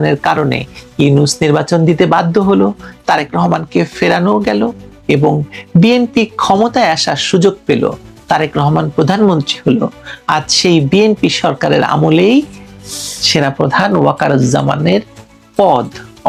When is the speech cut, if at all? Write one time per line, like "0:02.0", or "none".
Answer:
none